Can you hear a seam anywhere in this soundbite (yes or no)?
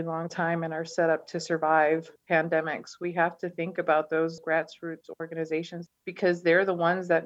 yes